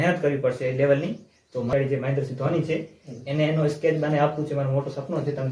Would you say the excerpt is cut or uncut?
cut